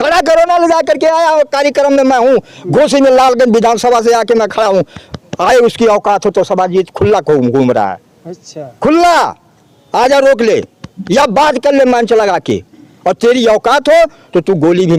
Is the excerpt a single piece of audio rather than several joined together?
yes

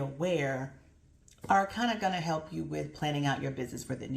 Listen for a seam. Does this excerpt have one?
no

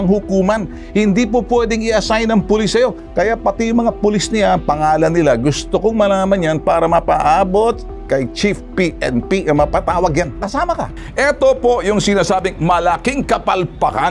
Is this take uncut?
no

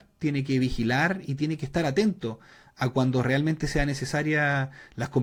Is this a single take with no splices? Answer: yes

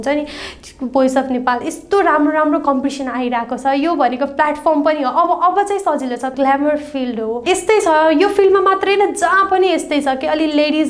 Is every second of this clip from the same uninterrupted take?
no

